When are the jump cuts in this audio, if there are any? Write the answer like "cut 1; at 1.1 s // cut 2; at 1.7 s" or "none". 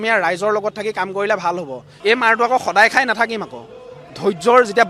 cut 1; at 1.8 s